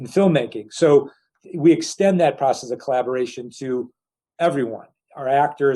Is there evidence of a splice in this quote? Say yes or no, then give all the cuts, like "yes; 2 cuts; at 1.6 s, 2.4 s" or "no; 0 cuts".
yes; 1 cut; at 1.3 s